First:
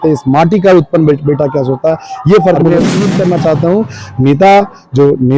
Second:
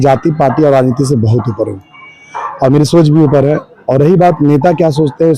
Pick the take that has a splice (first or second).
first